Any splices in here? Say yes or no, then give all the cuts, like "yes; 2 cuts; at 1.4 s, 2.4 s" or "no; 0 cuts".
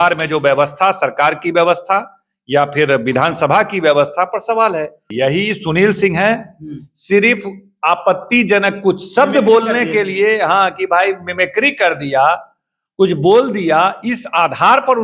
yes; 1 cut; at 5.1 s